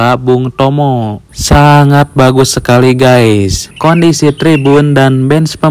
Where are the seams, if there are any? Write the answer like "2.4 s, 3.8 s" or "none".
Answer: 3.6 s